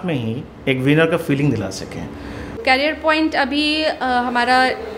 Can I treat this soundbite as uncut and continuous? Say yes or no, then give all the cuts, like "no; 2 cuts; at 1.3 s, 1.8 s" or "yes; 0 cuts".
no; 1 cut; at 2.6 s